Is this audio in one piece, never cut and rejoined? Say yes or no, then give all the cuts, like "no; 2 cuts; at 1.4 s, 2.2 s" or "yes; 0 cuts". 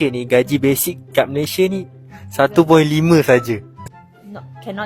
no; 1 cut; at 3.8 s